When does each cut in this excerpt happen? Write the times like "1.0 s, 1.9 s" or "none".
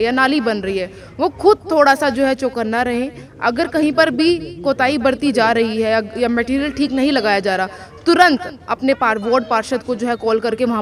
none